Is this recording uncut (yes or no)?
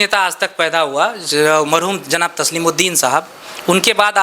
yes